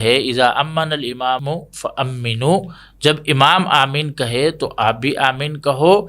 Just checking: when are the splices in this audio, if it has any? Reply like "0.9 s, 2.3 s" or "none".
1.4 s